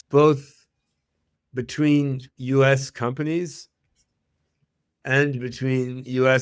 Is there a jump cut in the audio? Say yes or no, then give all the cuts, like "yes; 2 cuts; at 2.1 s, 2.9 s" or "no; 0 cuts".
no; 0 cuts